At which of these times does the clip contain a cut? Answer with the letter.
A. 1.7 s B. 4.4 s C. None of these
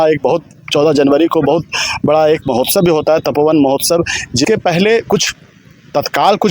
B